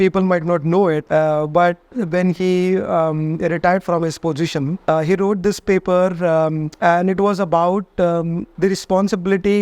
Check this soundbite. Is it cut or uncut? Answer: cut